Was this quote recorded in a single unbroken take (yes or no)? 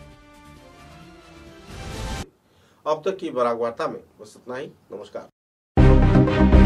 yes